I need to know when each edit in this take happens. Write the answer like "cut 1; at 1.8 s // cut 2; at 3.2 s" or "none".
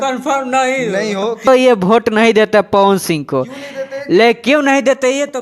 cut 1; at 1.5 s